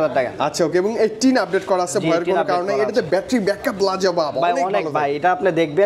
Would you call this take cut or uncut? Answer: uncut